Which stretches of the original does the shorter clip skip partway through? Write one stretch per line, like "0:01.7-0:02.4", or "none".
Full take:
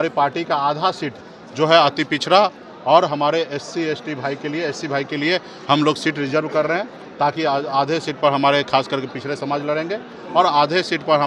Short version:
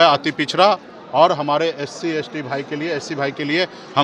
none

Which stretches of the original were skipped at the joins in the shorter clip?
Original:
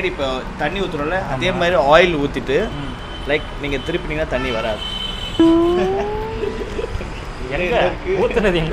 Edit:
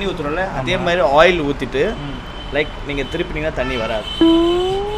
0:04.8-0:05.3

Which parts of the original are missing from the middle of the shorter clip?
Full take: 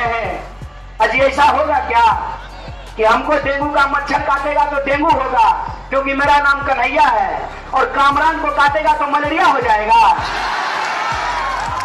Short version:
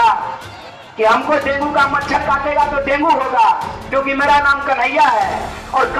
none

